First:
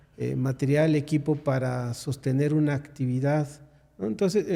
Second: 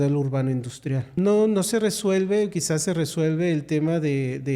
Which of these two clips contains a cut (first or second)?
second